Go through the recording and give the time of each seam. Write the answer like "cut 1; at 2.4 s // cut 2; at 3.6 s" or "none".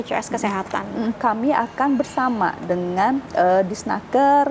cut 1; at 1.2 s